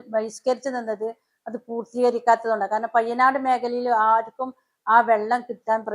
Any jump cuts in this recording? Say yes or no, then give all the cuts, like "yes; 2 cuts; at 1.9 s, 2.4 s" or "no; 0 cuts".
no; 0 cuts